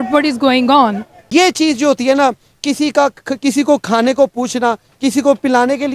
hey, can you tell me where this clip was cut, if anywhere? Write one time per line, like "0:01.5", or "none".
0:01.1